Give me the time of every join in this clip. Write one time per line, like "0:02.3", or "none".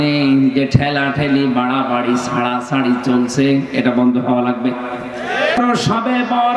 0:05.6